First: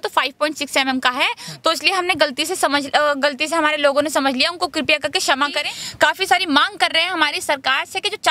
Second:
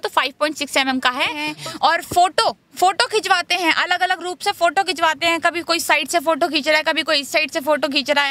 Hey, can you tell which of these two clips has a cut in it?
second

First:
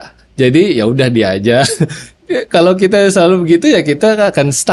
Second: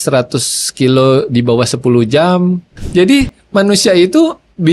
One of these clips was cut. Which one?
second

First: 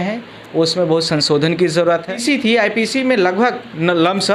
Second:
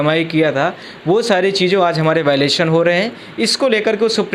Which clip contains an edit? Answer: first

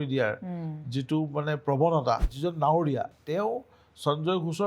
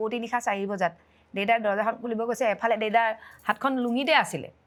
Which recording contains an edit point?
first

